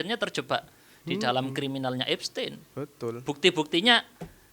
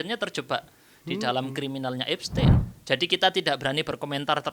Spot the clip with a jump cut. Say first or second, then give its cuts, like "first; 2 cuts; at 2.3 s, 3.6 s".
second; 1 cut; at 2.6 s